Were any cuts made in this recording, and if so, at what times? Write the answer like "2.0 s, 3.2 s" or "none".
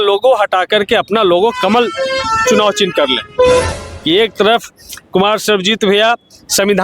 3.8 s